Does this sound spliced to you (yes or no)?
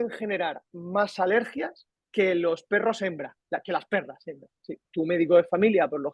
yes